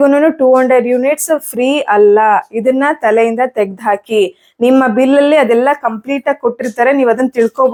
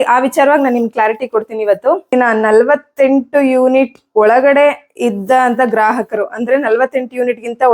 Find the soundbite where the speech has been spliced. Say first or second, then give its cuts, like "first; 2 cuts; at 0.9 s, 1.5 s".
second; 1 cut; at 2.1 s